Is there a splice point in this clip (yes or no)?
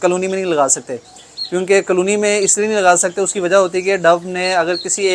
no